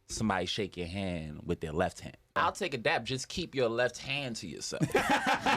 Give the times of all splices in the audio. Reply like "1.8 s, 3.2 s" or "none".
2.4 s